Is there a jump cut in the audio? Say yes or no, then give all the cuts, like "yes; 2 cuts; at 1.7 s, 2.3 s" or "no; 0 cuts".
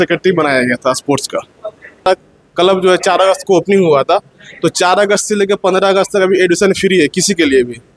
yes; 1 cut; at 2.0 s